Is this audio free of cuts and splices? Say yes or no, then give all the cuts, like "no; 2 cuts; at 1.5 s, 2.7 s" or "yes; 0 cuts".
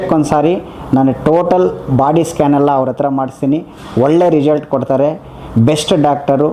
yes; 0 cuts